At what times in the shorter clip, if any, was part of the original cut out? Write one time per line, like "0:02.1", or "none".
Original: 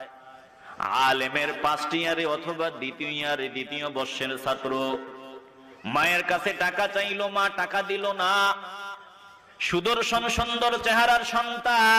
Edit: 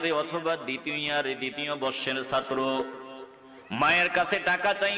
none